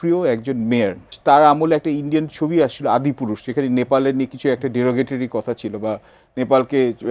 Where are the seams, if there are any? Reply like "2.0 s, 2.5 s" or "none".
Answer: 1.1 s